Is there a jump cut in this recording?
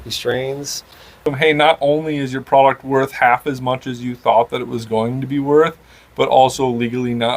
yes; 1 cut; at 1.2 s

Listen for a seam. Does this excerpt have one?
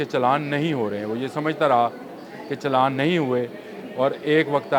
no; 0 cuts

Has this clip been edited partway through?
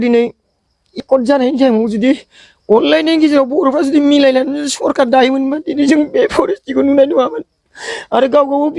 yes; 1 cut; at 1.0 s

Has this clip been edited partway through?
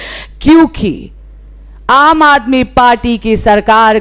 no; 0 cuts

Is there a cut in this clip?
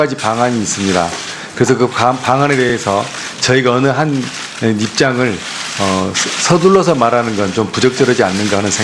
no; 0 cuts

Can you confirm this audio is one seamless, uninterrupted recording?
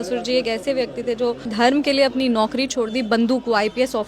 no; 1 cut; at 1.5 s

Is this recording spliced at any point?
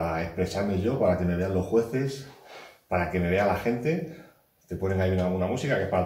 no; 0 cuts

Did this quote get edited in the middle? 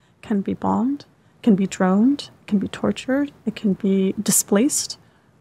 no; 0 cuts

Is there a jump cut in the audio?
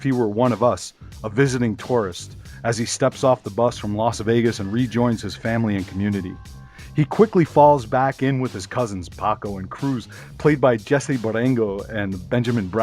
no; 0 cuts

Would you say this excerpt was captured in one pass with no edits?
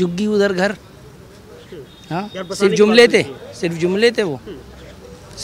yes; 0 cuts

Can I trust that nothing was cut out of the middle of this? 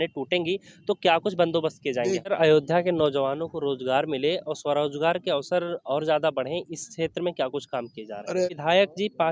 no; 2 cuts; at 2.3 s, 8.4 s

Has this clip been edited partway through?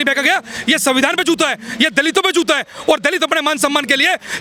no; 0 cuts

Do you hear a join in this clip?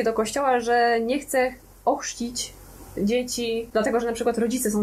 yes; 1 cut; at 3.7 s

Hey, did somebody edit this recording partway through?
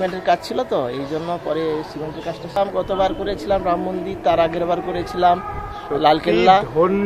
yes; 1 cut; at 2.6 s

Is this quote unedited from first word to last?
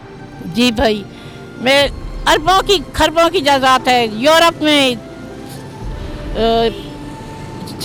yes; 0 cuts

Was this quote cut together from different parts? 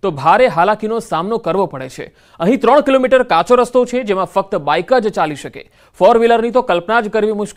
no; 0 cuts

